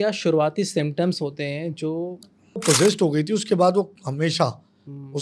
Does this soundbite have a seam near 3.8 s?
no; 1 cut; at 2.6 s

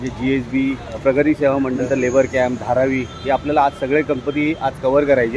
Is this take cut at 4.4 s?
no; 2 cuts; at 1.0 s, 1.8 s

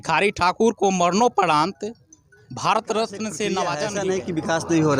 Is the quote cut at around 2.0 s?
no; 1 cut; at 3.8 s

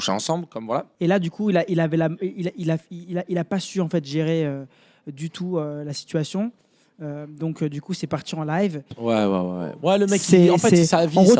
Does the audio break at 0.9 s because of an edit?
yes; 2 cuts; at 0.9 s, 8.9 s

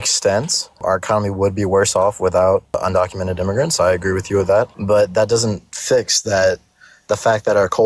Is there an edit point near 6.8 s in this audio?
no; 3 cuts; at 0.8 s, 2.8 s, 4.8 s

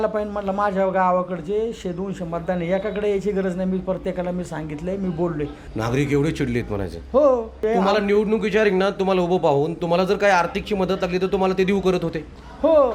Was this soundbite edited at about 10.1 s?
no; 2 cuts; at 5.6 s, 7.6 s

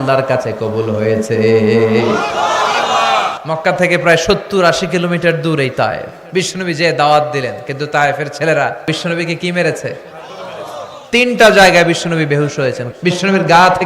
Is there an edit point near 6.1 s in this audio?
yes; 4 cuts; at 3.3 s, 6.1 s, 8.8 s, 12.8 s

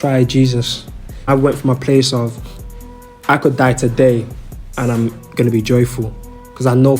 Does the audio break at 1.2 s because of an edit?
yes; 1 cut; at 1.2 s

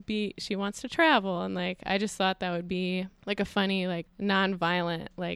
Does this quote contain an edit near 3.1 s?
yes; 2 cuts; at 3.1 s, 4.1 s

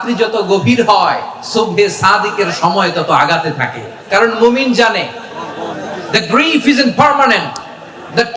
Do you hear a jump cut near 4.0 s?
yes; 1 cut; at 4.0 s

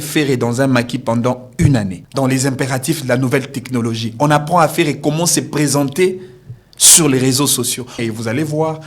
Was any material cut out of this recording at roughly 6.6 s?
no; 2 cuts; at 2.0 s, 7.9 s

